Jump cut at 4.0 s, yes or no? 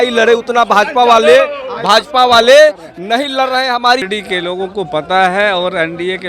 yes